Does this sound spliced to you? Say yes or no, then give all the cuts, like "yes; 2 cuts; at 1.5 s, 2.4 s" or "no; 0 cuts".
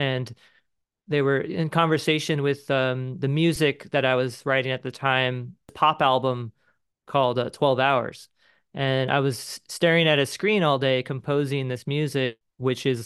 yes; 1 cut; at 5.7 s